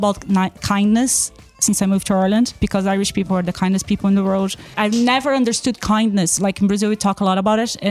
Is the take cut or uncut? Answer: cut